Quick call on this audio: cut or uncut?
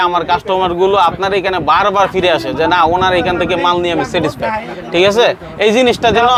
uncut